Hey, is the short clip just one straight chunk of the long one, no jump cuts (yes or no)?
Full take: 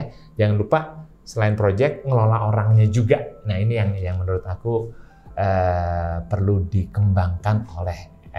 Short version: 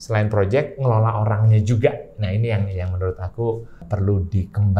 no